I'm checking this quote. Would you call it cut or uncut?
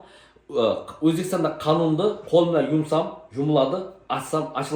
uncut